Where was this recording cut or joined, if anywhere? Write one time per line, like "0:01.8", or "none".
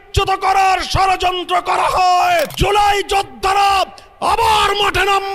0:02.5